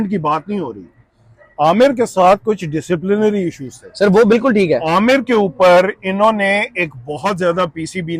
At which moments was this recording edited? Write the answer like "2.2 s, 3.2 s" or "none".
none

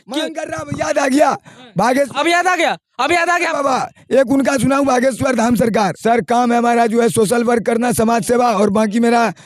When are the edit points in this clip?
6.0 s

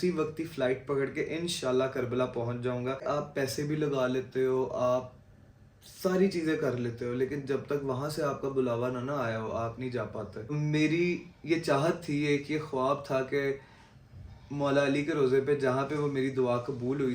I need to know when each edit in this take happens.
3.0 s, 10.5 s

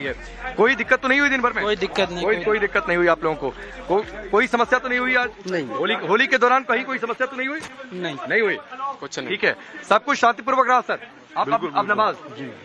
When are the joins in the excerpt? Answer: 9.2 s

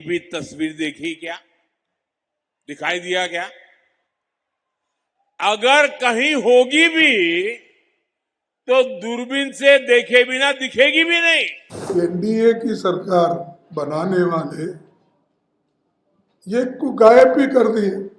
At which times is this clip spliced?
11.9 s

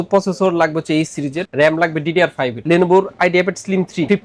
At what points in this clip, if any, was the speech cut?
2.6 s

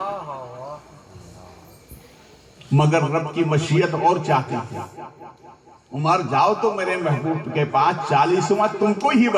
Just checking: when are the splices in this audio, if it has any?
none

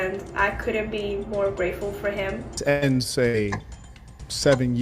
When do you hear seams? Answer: 2.6 s

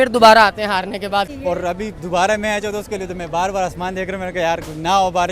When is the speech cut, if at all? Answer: 1.3 s

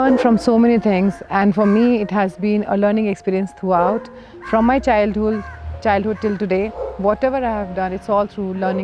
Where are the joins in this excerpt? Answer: none

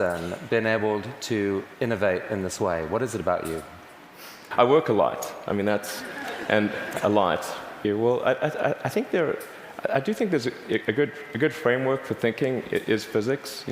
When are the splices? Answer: 4.4 s, 7.7 s

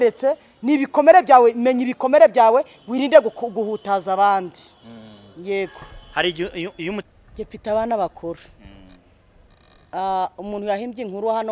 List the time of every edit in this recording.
7.1 s

